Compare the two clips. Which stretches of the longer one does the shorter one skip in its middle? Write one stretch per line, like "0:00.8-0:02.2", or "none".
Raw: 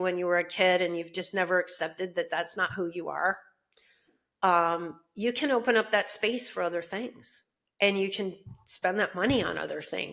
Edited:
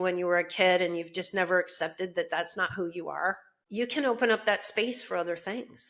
0:03.5-0:05.0